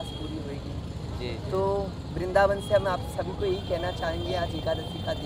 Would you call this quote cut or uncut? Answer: uncut